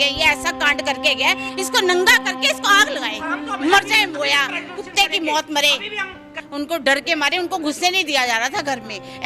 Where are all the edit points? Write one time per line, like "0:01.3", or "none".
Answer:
0:01.4
0:06.4